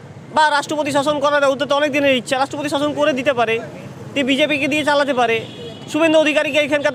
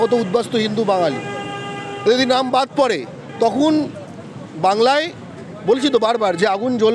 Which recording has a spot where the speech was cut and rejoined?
second; 1 cut; at 3.2 s

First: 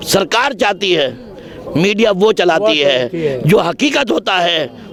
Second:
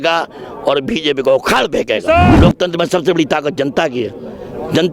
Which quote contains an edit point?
second; 1 cut; at 2.3 s

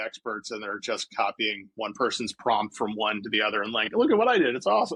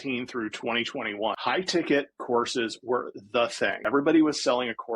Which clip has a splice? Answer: second; 2 cuts; at 1.4 s, 3.8 s

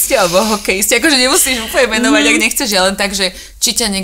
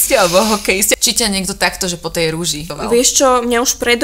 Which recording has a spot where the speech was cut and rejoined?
second; 2 cuts; at 1.0 s, 2.7 s

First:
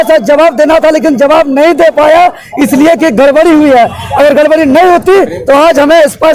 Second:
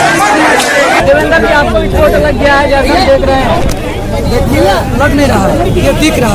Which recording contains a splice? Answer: second; 1 cut; at 0.9 s

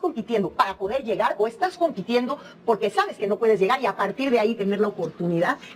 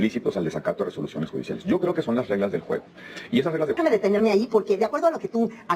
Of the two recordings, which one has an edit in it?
second; 1 cut; at 3.8 s

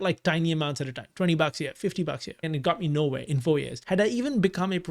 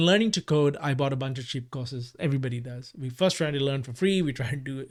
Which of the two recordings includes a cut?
first; 2 cuts; at 2.4 s, 3.7 s

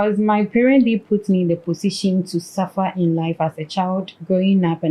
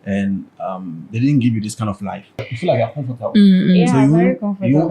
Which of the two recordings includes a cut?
second; 1 cut; at 2.5 s

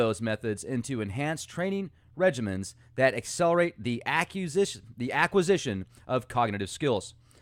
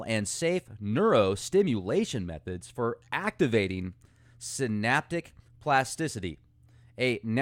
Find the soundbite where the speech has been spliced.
second; 1 cut; at 5.3 s

